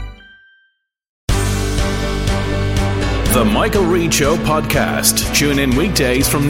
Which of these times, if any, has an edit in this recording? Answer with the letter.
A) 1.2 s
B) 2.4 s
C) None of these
A